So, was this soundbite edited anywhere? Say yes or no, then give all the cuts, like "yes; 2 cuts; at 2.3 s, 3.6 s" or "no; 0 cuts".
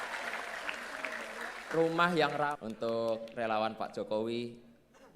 yes; 1 cut; at 2.5 s